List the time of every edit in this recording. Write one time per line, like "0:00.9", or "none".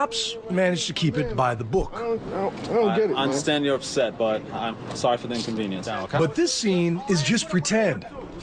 0:02.5

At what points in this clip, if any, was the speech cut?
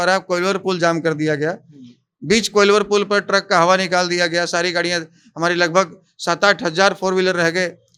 none

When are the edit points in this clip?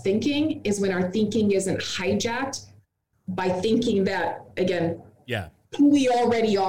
none

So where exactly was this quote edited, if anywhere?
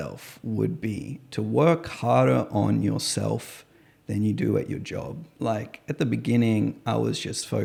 none

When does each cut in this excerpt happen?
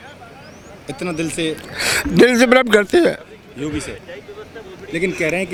none

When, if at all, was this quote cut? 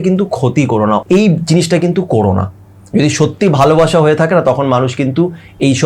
0:01.0

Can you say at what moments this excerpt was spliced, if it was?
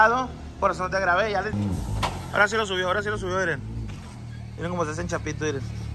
0:01.5

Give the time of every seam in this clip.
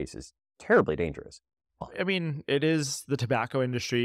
0:01.8

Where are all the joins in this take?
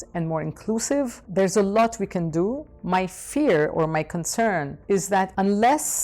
0:01.2
0:05.2

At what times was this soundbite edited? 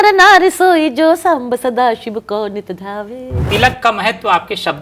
0:03.4

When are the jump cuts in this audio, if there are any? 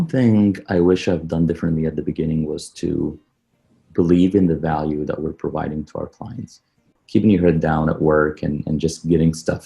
0:06.9

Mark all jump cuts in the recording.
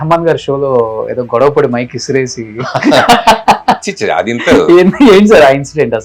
none

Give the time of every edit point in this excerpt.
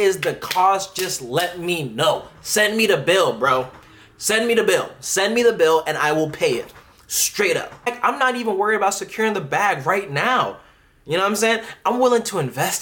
0:07.9

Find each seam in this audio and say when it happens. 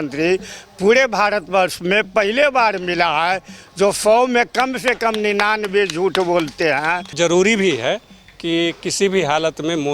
0:07.1

